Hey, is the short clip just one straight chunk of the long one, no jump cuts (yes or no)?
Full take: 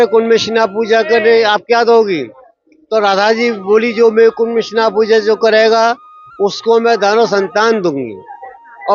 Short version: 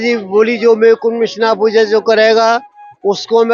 yes